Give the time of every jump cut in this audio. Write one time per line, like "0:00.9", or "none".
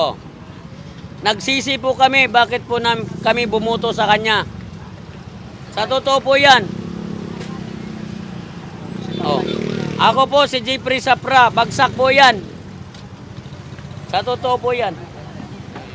none